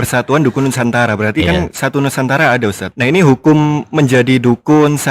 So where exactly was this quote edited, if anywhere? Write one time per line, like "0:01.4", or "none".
0:02.9